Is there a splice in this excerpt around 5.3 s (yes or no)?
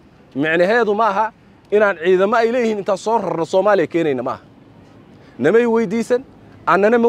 no